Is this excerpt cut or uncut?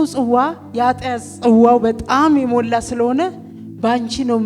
uncut